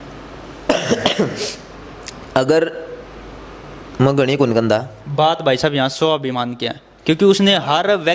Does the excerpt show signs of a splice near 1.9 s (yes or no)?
no